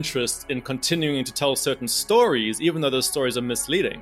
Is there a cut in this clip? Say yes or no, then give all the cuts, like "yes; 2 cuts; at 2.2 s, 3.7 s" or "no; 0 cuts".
no; 0 cuts